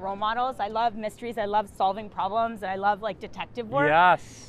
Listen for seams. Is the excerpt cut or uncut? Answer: uncut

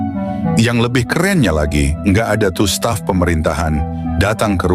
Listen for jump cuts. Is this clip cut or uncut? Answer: uncut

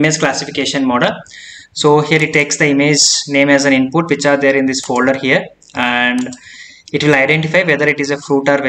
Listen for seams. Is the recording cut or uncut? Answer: uncut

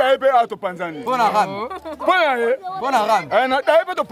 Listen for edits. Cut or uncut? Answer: uncut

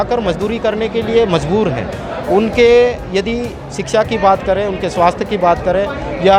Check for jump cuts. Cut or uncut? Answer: uncut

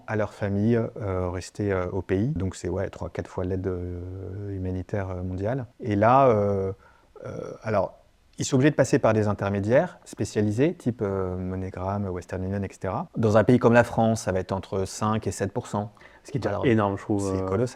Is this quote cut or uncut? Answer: cut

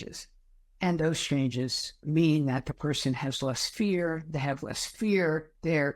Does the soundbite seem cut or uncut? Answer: cut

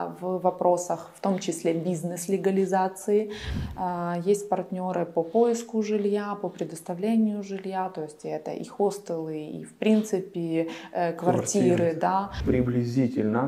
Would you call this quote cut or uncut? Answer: cut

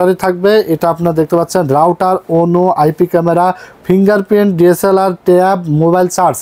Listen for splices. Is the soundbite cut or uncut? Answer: uncut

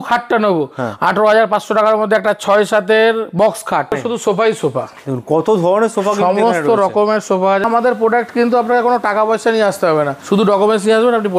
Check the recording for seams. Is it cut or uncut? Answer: cut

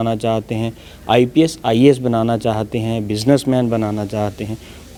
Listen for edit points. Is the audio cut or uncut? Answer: uncut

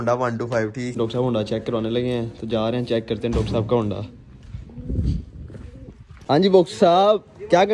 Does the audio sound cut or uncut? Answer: cut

